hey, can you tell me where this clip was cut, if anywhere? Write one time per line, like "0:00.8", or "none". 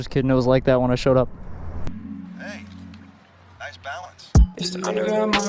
0:01.9